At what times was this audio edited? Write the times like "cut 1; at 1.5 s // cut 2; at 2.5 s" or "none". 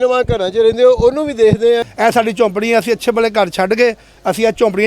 cut 1; at 1.9 s